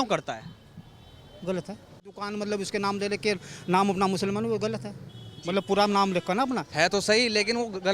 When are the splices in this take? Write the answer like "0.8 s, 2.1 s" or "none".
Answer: 2.2 s, 6.7 s

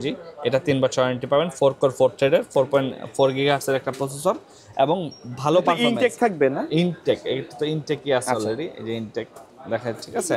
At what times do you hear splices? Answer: none

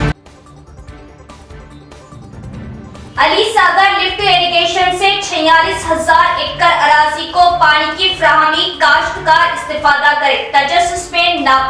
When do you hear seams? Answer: 2.7 s

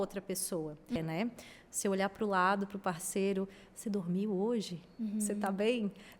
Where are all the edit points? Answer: 1.0 s

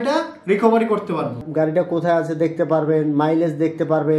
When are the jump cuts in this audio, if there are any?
1.4 s

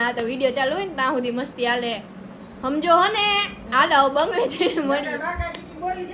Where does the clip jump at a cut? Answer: none

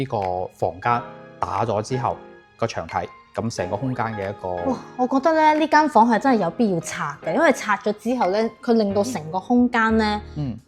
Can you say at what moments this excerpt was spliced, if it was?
none

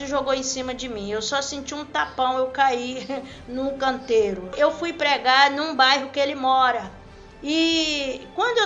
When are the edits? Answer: 4.5 s

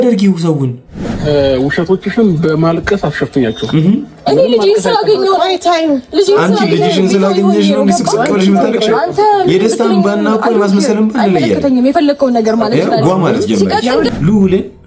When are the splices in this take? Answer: 1.2 s, 14.1 s

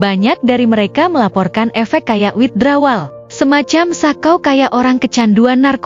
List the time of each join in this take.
none

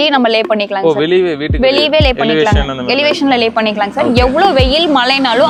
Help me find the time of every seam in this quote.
none

